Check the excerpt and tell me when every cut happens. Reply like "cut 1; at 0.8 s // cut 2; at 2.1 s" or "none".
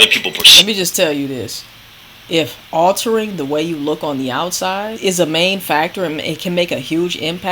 cut 1; at 5.0 s